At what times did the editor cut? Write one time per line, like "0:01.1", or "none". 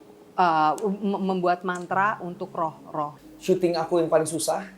0:03.2